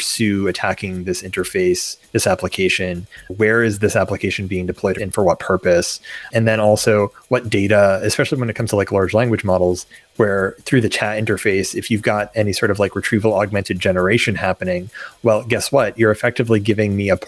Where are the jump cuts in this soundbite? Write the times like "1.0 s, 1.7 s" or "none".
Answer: 3.2 s, 5.0 s, 6.3 s

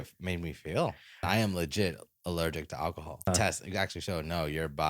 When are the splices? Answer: 1.3 s, 3.3 s

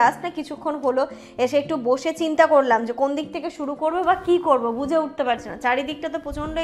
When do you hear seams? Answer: none

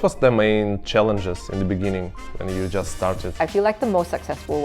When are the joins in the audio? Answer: 3.4 s

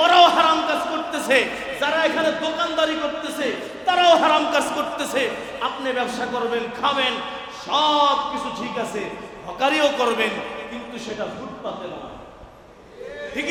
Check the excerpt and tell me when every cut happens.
none

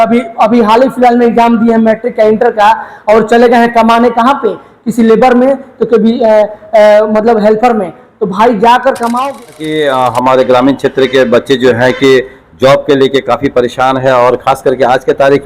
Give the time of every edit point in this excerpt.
9.5 s

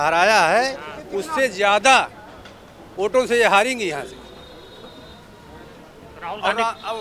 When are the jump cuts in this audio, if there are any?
none

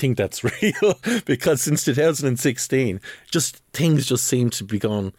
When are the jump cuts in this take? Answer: none

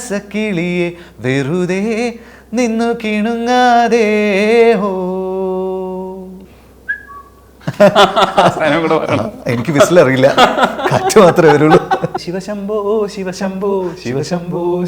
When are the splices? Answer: 12.2 s

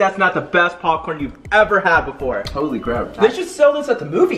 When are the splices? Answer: none

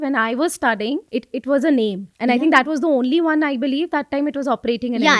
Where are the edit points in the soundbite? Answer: 1.0 s, 2.1 s

